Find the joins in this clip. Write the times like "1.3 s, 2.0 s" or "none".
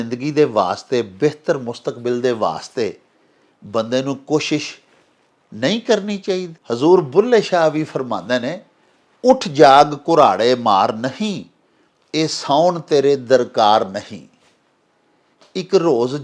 6.6 s

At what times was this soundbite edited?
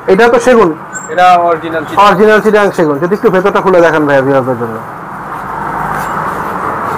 none

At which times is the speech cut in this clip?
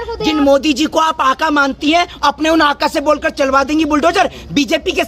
none

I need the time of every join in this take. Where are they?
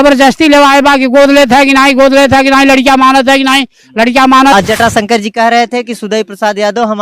4.5 s

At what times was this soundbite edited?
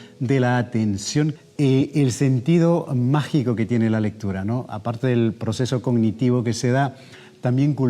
1.4 s

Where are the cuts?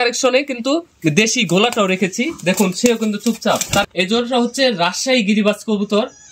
3.8 s

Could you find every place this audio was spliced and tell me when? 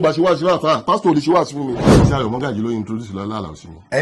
1.9 s

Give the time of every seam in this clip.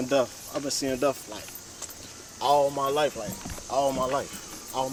none

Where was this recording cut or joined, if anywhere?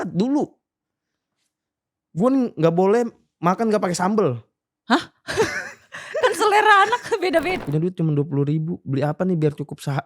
7.6 s

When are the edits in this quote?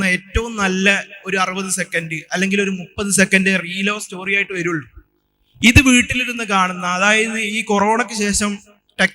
none

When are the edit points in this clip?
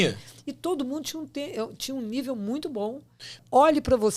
3.2 s

